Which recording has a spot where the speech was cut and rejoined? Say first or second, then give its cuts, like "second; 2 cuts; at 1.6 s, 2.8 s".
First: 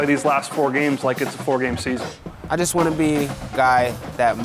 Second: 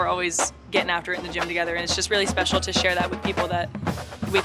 first; 1 cut; at 2.2 s